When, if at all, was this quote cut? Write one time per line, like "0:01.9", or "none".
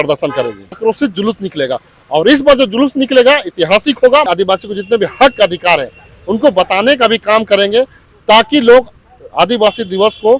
0:00.8
0:04.3